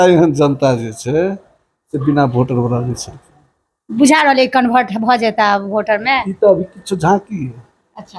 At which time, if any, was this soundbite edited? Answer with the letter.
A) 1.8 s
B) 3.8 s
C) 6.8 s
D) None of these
D